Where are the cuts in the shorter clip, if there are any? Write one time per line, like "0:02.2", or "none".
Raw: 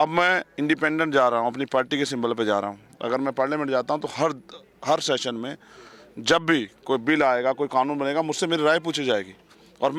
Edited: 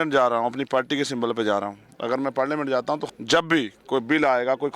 0:03.1